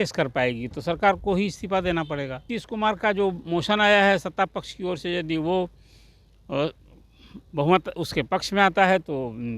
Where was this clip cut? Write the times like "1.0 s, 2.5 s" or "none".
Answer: 2.6 s